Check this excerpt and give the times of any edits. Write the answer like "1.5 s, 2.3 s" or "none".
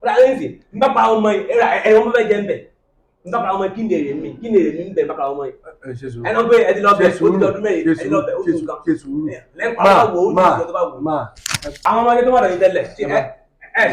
12.0 s